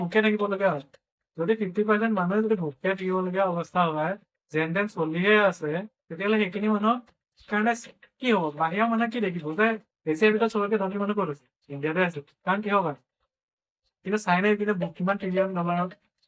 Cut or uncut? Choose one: cut